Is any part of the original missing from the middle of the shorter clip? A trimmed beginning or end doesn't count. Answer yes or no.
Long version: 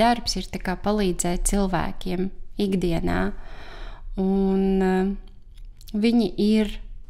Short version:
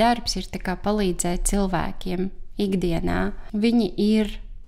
yes